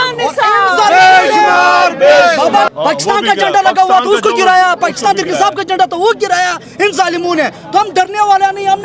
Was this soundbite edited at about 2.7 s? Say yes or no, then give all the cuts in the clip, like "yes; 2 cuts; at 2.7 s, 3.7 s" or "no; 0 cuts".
yes; 1 cut; at 2.7 s